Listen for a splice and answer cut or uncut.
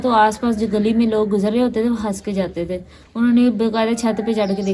uncut